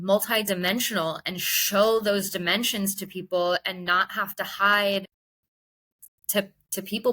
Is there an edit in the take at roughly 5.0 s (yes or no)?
yes